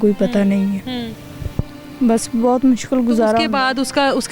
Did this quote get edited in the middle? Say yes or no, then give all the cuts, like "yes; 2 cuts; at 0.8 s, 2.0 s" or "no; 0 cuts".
no; 0 cuts